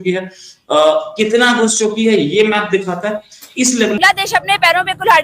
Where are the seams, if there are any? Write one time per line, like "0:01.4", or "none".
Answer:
0:04.0